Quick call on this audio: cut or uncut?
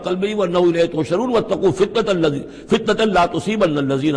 uncut